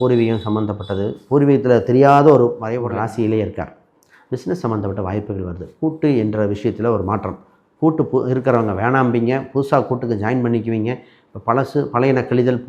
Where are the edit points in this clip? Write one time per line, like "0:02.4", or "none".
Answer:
0:02.8